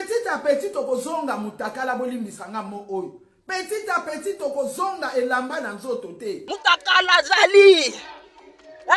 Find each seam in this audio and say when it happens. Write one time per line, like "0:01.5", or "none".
0:06.5